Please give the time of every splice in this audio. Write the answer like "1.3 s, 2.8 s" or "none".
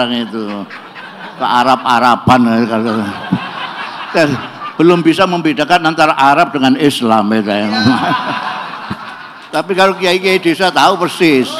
none